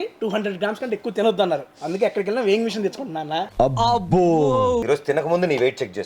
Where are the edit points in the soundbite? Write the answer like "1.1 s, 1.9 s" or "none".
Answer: 3.5 s, 4.8 s